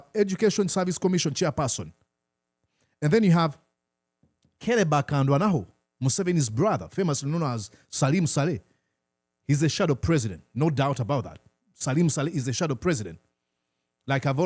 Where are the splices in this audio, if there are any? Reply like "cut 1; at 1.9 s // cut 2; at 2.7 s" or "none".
none